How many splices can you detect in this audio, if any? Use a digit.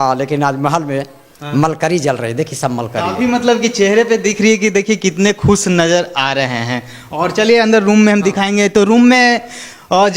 0